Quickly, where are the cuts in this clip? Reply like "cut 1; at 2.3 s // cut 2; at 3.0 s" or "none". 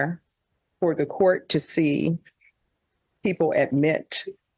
none

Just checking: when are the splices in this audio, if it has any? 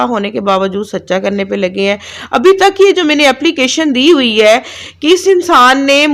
none

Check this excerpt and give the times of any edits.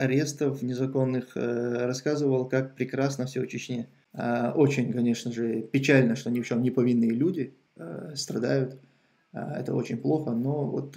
cut 1; at 4.0 s

